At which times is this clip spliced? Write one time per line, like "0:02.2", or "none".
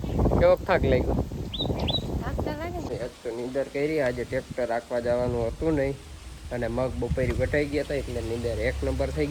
0:02.9